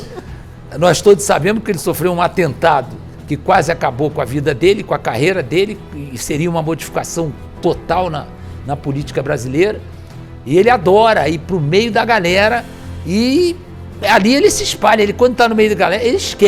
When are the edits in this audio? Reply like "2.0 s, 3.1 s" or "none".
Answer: none